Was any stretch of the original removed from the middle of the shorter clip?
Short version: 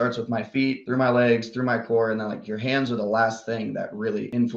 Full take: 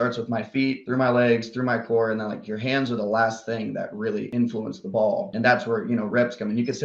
no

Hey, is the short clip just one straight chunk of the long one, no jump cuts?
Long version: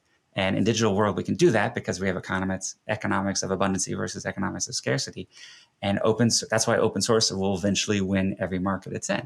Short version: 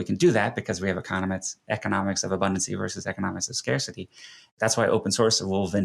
no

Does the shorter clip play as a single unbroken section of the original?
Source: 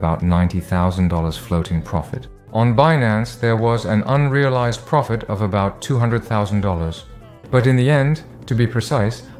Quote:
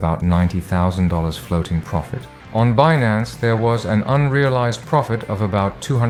yes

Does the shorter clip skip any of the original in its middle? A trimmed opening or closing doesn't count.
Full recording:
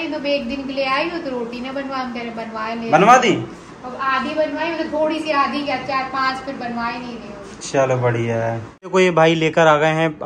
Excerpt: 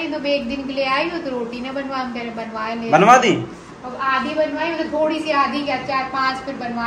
no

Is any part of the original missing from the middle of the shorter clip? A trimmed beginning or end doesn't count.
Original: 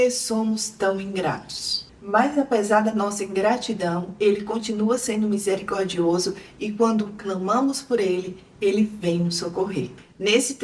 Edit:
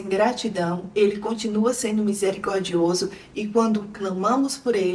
no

